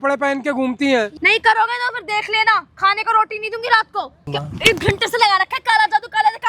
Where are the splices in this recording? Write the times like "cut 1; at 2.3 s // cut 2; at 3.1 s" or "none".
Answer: cut 1; at 1.1 s // cut 2; at 4.4 s